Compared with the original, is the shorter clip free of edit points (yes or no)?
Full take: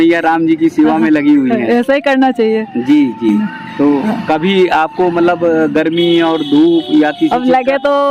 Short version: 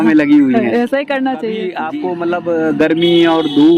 no